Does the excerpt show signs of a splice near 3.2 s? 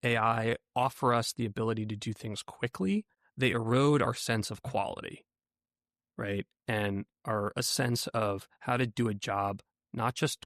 yes; 1 cut; at 3.2 s

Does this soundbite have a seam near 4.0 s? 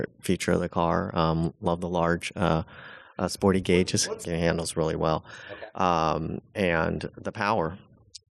yes; 1 cut; at 4.0 s

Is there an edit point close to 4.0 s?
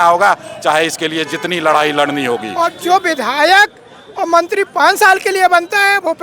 no; 1 cut; at 2.5 s

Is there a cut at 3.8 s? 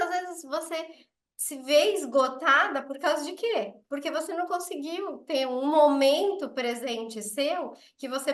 yes; 1 cut; at 3.8 s

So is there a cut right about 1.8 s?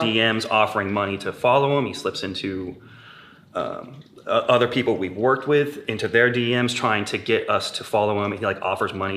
no; 0 cuts

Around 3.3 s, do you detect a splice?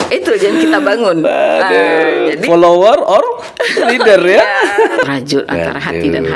no; 1 cut; at 5.0 s

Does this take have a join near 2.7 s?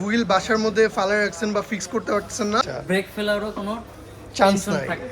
yes; 1 cut; at 2.7 s

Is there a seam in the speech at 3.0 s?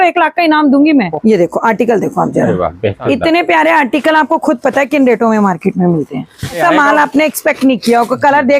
yes; 3 cuts; at 1.1 s, 3.0 s, 6.6 s

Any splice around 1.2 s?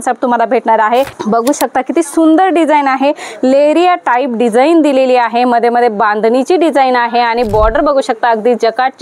yes; 1 cut; at 1.2 s

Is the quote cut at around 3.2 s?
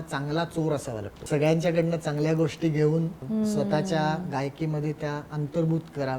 yes; 2 cuts; at 1.2 s, 3.2 s

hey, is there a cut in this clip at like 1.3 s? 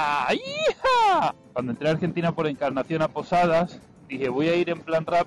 yes; 1 cut; at 1.3 s

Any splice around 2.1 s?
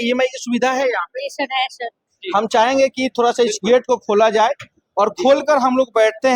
yes; 1 cut; at 2.1 s

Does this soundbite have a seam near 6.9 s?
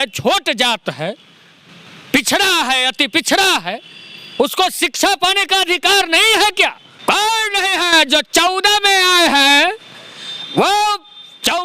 yes; 1 cut; at 6.9 s

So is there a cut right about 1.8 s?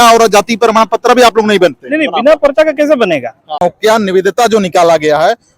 no; 1 cut; at 3.6 s

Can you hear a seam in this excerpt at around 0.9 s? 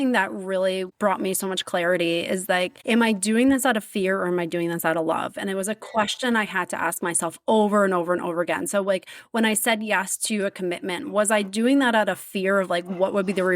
yes; 2 cuts; at 0.9 s, 2.8 s

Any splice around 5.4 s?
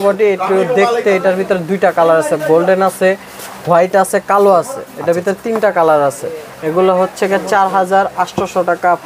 no; 0 cuts

